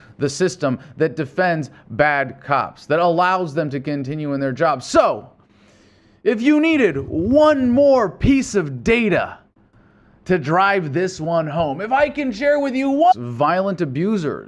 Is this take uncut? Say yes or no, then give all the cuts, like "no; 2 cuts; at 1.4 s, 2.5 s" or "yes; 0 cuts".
yes; 0 cuts